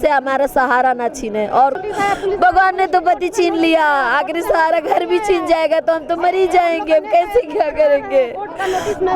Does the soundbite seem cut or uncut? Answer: cut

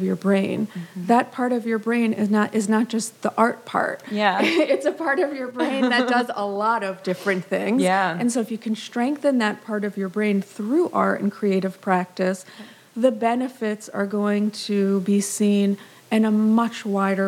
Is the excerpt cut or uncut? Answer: uncut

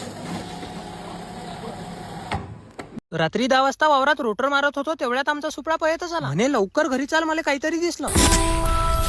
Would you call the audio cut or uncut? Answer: cut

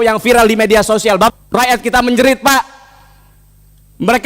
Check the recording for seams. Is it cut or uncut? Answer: cut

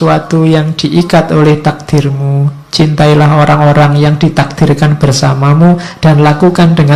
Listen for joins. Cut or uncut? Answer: uncut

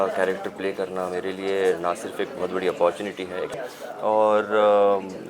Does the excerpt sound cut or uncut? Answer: cut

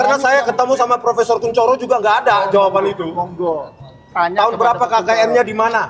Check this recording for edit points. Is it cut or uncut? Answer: uncut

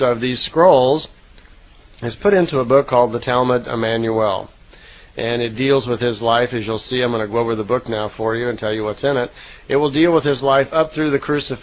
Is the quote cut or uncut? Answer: uncut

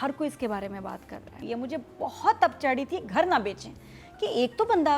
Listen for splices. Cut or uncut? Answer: cut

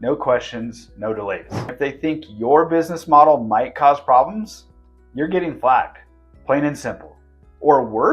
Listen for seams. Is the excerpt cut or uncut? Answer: cut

